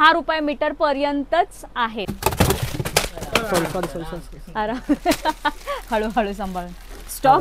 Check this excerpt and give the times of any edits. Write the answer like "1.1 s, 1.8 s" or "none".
2.1 s